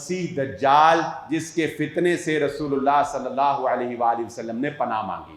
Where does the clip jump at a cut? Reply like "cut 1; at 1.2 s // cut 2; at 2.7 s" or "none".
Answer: none